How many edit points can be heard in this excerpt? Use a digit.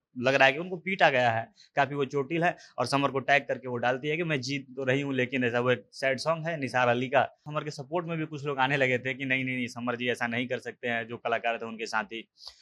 1